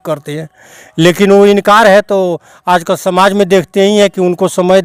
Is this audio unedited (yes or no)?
yes